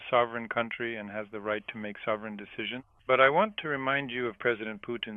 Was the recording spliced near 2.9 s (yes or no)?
yes